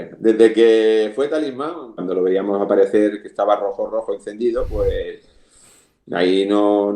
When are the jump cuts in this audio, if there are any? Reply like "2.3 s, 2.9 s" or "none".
2.0 s

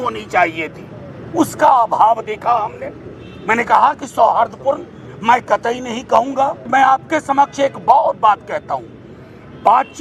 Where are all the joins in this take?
6.7 s

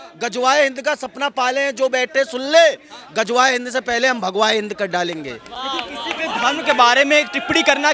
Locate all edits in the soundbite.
none

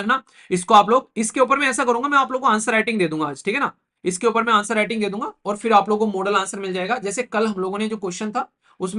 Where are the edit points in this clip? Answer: none

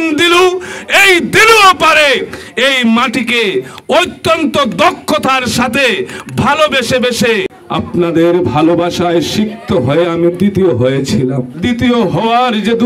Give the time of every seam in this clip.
7.6 s, 11.5 s

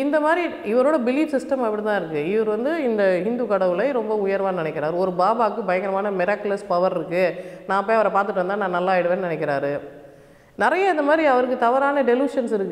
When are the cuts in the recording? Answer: none

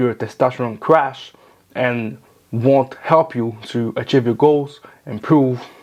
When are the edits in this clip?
none

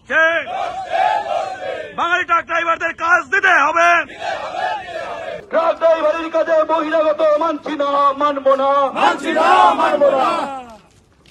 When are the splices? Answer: 5.4 s

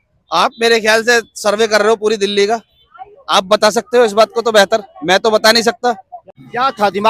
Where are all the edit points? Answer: none

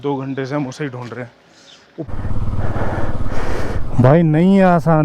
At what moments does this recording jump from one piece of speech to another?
2.1 s

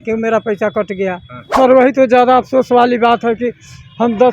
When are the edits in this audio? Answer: 1.5 s

